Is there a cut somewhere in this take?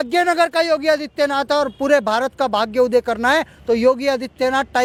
no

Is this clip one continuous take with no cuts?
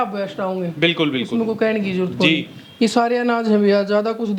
yes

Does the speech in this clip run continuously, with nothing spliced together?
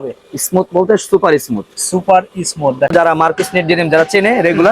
no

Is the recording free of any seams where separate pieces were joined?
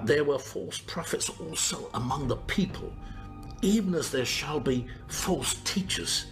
no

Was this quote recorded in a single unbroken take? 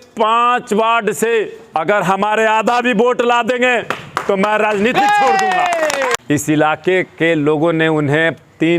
no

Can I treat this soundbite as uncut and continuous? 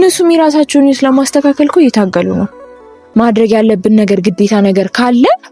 no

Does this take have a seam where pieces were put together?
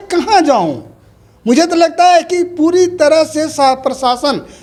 no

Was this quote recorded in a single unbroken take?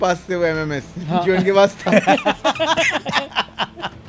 yes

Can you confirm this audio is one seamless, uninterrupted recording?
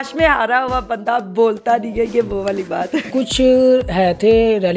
no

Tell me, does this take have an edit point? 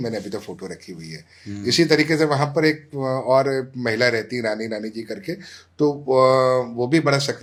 no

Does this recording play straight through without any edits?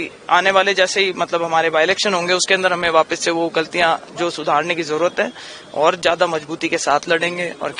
yes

